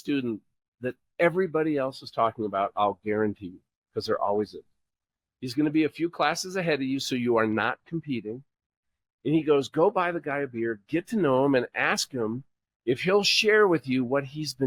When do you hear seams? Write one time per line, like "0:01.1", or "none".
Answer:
none